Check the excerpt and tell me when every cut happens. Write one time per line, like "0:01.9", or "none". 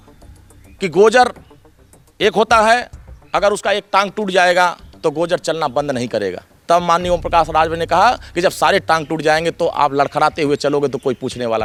none